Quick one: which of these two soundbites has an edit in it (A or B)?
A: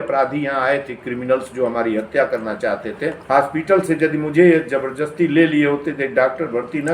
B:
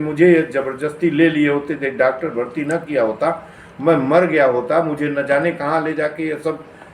A